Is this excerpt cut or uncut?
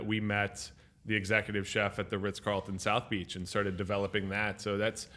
uncut